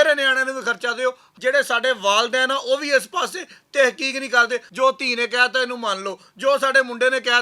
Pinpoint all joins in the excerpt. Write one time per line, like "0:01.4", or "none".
0:01.3
0:04.7